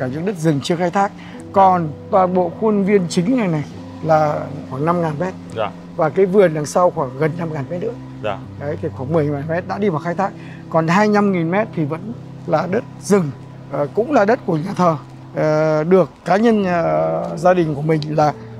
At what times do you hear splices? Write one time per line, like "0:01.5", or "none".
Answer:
none